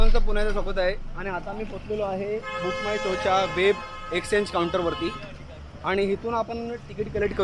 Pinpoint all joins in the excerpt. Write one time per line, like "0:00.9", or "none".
none